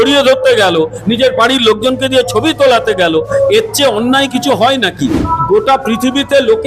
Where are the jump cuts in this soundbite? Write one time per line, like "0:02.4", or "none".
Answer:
0:05.3